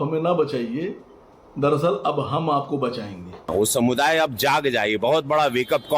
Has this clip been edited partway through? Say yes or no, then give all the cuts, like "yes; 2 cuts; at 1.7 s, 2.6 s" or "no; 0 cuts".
yes; 1 cut; at 3.5 s